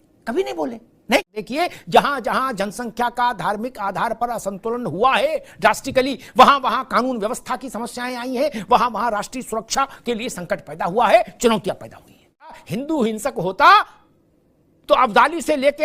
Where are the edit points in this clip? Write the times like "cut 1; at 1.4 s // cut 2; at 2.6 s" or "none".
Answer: cut 1; at 1.4 s // cut 2; at 12.6 s